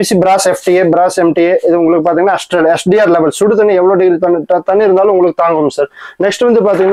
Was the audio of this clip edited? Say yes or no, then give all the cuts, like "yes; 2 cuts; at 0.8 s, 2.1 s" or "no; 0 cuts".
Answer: no; 0 cuts